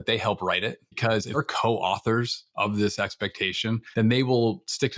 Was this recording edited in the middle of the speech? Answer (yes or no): yes